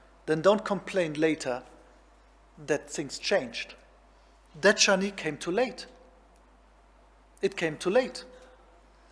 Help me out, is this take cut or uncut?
uncut